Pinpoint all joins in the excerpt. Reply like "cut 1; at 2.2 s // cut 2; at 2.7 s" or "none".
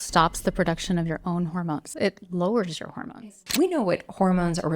cut 1; at 1.9 s // cut 2; at 3.4 s